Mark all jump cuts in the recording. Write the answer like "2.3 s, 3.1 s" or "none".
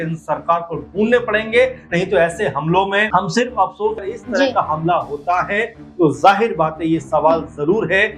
3.1 s, 4.1 s